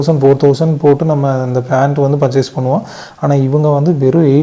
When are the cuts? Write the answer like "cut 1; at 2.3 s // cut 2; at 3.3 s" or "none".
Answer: none